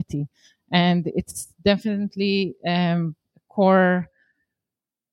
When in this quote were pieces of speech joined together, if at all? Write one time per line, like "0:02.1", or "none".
none